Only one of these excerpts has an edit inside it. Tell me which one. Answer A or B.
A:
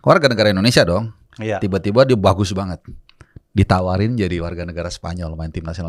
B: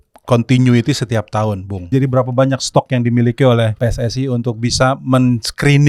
B